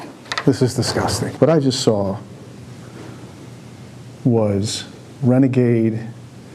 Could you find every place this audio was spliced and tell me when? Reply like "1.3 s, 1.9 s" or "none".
none